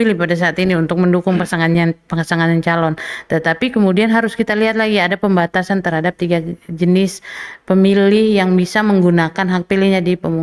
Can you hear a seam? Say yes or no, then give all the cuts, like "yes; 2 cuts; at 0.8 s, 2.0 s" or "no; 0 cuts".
no; 0 cuts